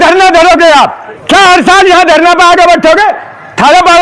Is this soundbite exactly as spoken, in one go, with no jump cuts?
no; 1 cut; at 1.1 s

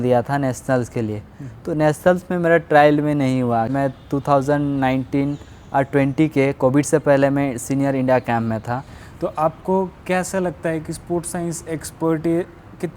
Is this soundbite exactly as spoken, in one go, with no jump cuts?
no; 2 cuts; at 3.7 s, 8.7 s

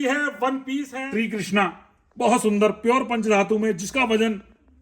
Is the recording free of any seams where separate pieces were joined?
no; 1 cut; at 1.0 s

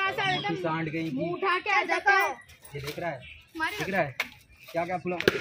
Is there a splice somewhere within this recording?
no; 0 cuts

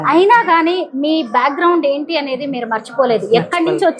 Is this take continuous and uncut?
yes; 0 cuts

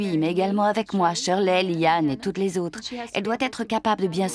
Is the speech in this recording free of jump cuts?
yes; 0 cuts

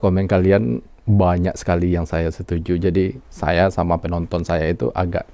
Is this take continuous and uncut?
yes; 0 cuts

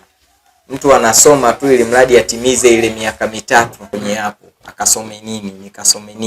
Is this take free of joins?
no; 1 cut; at 3.8 s

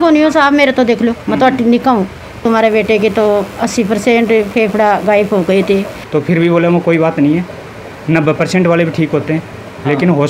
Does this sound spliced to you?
yes; 2 cuts; at 2.4 s, 6.0 s

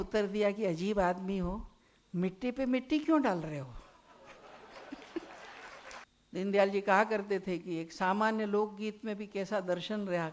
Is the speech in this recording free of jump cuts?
no; 1 cut; at 6.1 s

